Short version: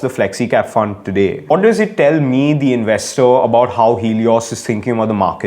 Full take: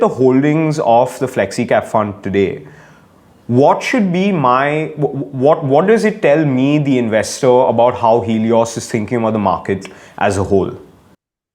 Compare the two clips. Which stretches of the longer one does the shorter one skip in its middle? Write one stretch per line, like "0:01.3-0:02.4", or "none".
0:02.7-0:05.8